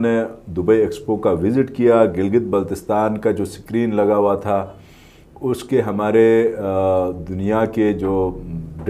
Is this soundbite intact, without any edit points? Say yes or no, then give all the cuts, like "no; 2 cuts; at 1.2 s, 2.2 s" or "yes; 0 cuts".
yes; 0 cuts